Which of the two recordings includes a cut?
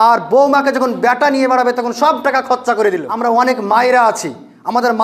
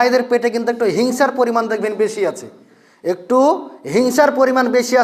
first; 1 cut; at 3.1 s

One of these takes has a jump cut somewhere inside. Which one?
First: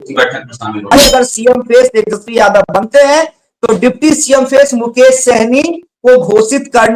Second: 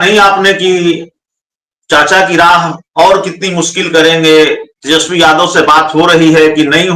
first; 1 cut; at 0.9 s

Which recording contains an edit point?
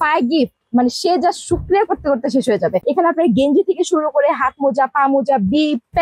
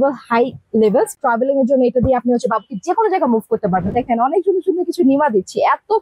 second; 2 cuts; at 1.1 s, 3.9 s

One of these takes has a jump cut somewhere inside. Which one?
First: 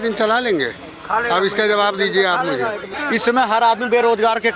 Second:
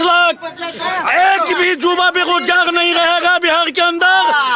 first; 1 cut; at 2.9 s

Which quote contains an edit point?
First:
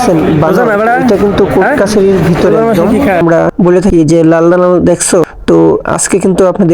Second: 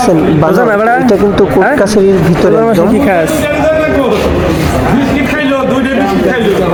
first; 1 cut; at 3.2 s

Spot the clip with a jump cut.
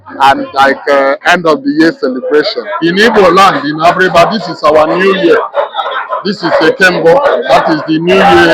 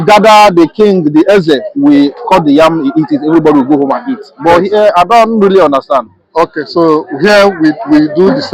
first; 1 cut; at 2.6 s

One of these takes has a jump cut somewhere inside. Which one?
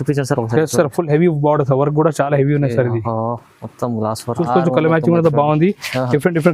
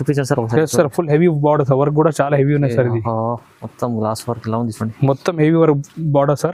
first; 1 cut; at 4.4 s

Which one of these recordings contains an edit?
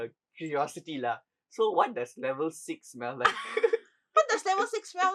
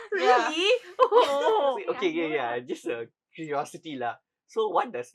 second; 1 cut; at 1.8 s

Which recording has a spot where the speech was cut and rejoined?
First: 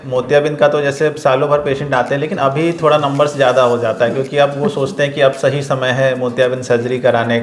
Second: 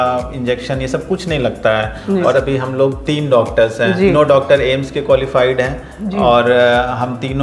second; 2 cuts; at 2.3 s, 4.1 s

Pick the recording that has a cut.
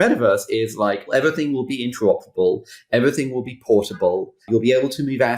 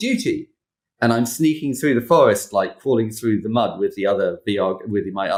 first; 2 cuts; at 1.1 s, 4.4 s

